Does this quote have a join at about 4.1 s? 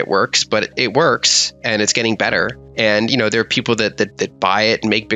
yes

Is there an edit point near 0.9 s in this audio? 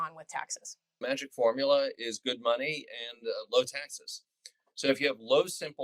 yes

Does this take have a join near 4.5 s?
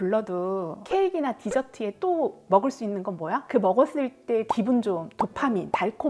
yes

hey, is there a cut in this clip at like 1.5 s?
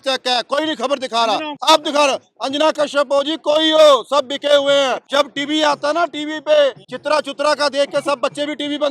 yes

